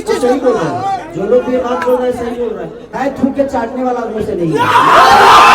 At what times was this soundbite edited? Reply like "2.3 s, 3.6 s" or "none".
2.8 s